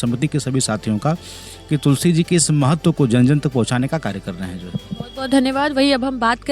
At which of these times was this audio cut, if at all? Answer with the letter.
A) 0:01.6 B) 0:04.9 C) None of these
C